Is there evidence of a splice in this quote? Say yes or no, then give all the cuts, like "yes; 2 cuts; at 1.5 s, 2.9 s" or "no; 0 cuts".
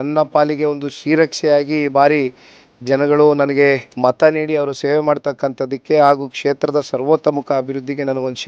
no; 0 cuts